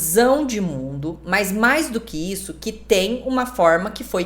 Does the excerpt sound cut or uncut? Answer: uncut